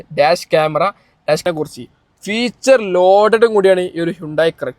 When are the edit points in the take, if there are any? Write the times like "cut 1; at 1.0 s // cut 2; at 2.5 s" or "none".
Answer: cut 1; at 1.4 s